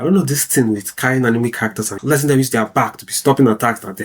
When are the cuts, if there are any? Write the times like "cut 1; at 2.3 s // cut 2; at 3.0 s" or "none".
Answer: cut 1; at 1.9 s